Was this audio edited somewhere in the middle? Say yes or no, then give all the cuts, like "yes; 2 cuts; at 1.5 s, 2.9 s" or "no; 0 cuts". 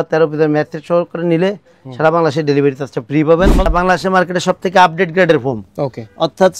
yes; 1 cut; at 3.7 s